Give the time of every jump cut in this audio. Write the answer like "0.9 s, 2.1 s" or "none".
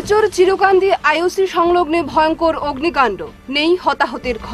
none